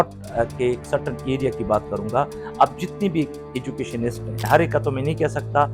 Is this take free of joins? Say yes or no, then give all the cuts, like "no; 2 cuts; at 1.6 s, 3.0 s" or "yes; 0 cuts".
no; 1 cut; at 4.4 s